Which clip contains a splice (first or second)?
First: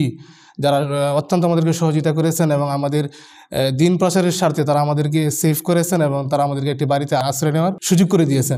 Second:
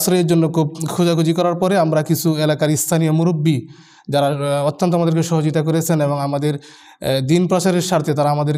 first